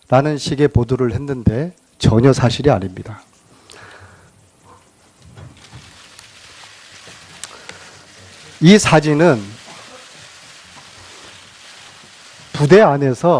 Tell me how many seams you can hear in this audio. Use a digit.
1